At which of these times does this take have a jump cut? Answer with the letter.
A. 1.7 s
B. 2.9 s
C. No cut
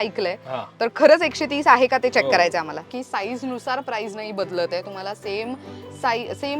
B